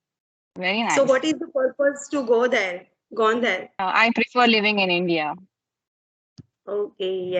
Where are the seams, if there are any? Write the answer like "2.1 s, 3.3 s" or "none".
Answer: 3.8 s